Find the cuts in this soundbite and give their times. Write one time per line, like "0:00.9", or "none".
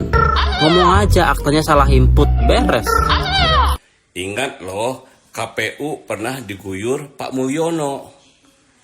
0:03.8